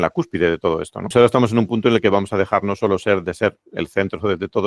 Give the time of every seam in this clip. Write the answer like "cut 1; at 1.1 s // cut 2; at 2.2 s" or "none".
cut 1; at 1.1 s